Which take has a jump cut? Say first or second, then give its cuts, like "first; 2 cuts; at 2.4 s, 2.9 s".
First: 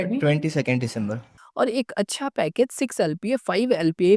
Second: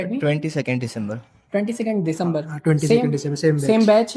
first; 1 cut; at 1.3 s